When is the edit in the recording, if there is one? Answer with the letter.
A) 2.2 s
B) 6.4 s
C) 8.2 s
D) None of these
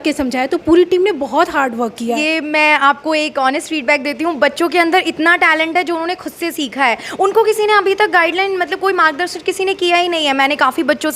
A